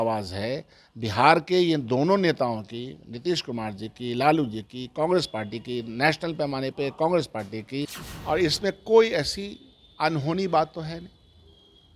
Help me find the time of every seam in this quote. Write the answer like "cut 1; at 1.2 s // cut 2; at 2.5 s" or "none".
cut 1; at 8.1 s